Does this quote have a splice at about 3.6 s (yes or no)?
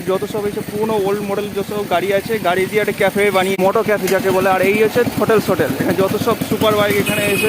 yes